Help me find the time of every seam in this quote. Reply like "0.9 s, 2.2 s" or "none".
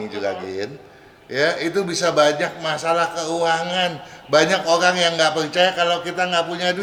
none

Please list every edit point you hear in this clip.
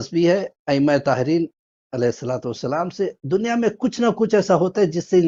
none

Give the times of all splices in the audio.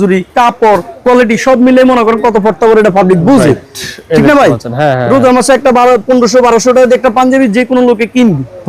none

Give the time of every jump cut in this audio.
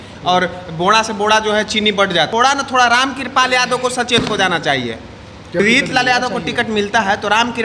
2.3 s, 5.6 s

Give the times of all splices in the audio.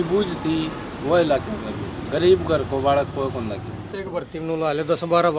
2.0 s, 3.9 s

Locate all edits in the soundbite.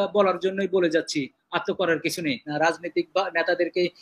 2.5 s

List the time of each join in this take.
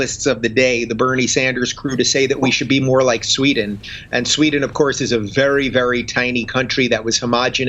none

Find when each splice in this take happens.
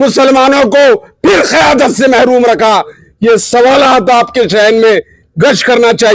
none

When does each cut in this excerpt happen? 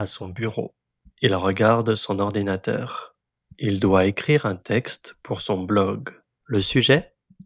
none

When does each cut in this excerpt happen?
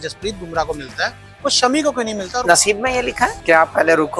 2.3 s, 3.4 s

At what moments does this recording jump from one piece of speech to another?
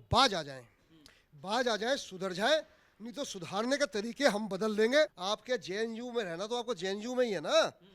5.2 s

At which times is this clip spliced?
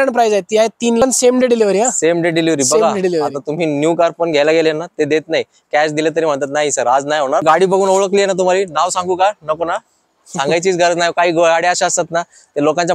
1.0 s, 7.4 s

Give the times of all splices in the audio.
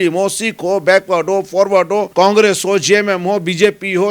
2.1 s

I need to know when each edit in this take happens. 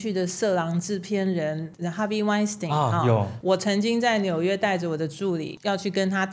3.3 s, 5.5 s

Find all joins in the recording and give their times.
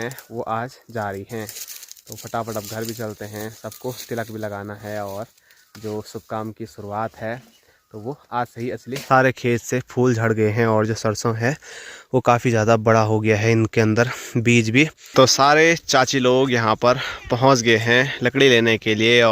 8.9 s, 15.0 s

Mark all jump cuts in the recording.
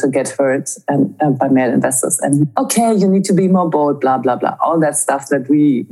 1.3 s, 2.5 s

